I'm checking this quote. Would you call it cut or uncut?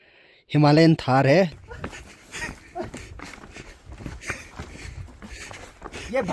cut